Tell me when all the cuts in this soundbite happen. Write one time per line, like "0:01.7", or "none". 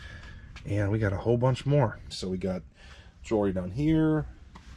0:02.2